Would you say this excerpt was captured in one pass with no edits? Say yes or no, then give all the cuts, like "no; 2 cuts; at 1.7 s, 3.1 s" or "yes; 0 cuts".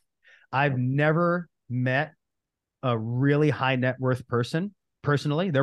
yes; 0 cuts